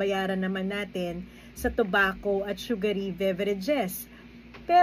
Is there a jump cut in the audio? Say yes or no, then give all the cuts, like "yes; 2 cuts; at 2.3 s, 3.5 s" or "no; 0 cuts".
no; 0 cuts